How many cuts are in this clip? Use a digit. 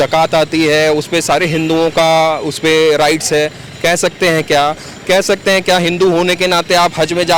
0